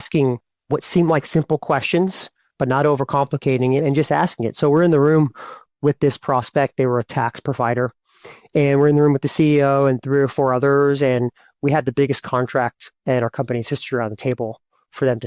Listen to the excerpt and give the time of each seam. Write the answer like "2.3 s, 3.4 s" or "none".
none